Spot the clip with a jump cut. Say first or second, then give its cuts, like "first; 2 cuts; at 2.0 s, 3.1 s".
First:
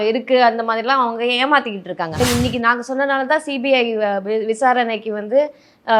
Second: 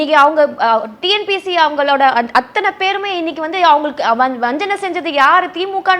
first; 1 cut; at 2.2 s